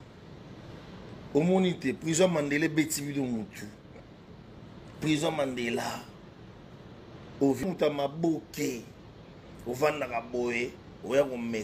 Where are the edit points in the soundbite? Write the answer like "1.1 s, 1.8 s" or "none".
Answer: 7.6 s

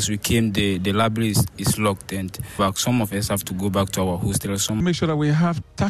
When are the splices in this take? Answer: 2.6 s, 4.8 s

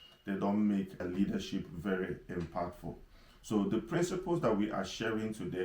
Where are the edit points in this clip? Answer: 1.0 s

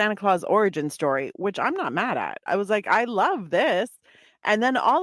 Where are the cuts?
2.4 s

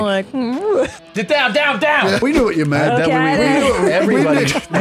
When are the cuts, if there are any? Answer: 1.0 s, 2.2 s

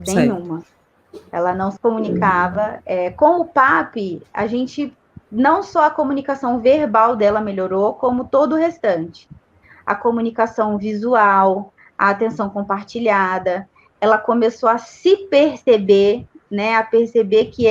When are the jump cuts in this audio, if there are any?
2.8 s

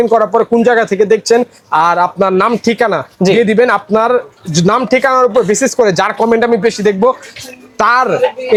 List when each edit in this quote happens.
none

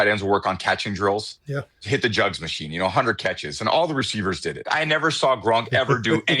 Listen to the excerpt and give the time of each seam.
1.8 s, 4.6 s

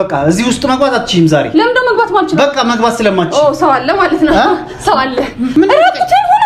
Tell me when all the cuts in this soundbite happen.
5.5 s

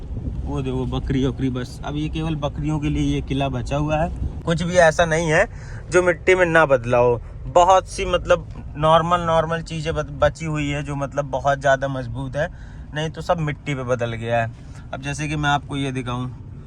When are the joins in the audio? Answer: 4.3 s

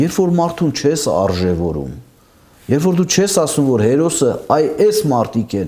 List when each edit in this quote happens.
none

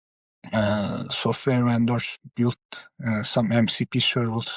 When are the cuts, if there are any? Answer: 2.2 s

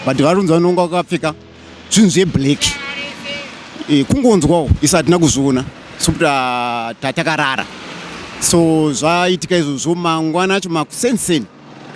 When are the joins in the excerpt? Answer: none

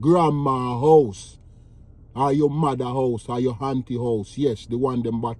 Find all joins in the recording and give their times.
none

